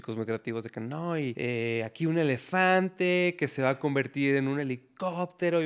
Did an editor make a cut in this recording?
yes; 1 cut; at 1.4 s

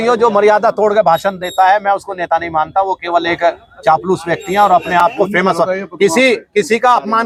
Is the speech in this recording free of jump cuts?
yes; 0 cuts

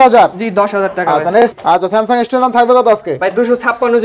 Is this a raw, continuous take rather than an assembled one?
no; 1 cut; at 1.5 s

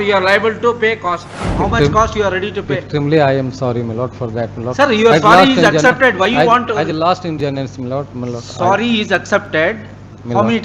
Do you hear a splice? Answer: yes; 1 cut; at 1.4 s

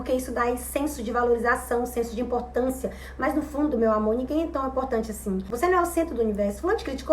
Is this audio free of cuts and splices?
no; 1 cut; at 5.5 s

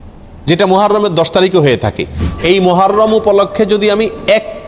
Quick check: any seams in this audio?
yes; 1 cut; at 2.3 s

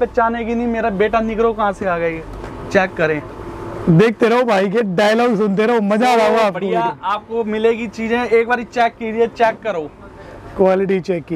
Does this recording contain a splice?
no; 0 cuts

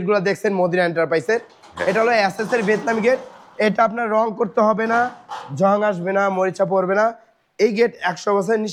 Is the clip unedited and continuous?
yes; 0 cuts

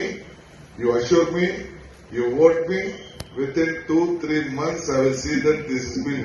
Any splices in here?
no; 0 cuts

